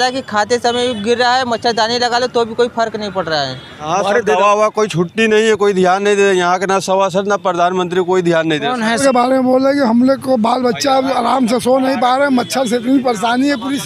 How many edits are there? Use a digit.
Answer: 2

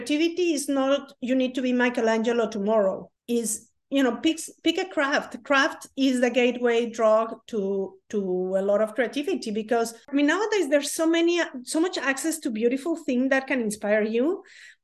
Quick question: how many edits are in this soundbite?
2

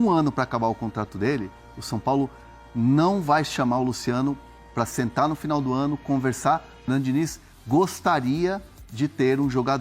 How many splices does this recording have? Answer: 1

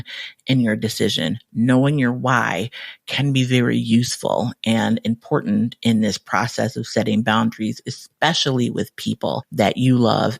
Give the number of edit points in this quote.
1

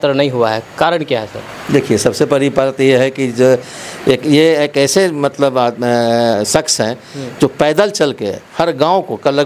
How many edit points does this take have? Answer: 0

